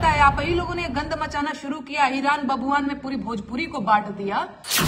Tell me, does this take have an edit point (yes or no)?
no